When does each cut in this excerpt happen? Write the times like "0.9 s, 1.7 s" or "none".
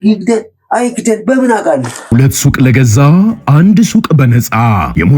1.9 s